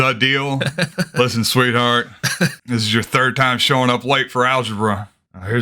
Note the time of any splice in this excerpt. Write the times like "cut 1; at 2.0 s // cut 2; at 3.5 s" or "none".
cut 1; at 0.9 s // cut 2; at 2.6 s